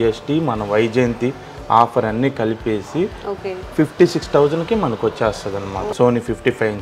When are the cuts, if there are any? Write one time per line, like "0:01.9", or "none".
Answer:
0:05.9